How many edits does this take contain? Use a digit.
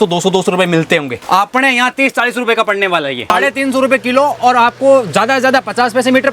2